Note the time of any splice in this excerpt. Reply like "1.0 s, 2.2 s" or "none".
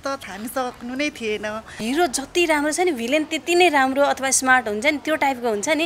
1.8 s